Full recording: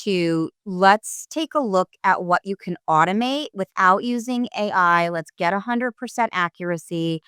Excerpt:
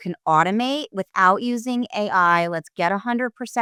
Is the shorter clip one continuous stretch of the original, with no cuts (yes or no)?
yes